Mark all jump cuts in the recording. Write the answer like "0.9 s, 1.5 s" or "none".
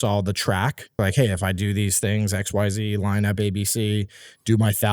1.0 s